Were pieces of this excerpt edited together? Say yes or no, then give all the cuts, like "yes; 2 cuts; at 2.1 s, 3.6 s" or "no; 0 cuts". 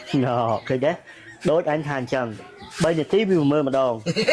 no; 0 cuts